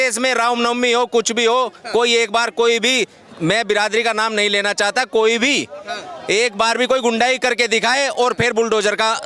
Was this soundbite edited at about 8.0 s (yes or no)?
no